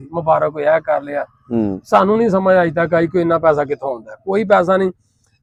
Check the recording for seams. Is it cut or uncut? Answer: uncut